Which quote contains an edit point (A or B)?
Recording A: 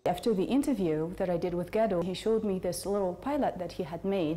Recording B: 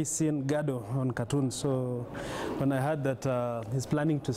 A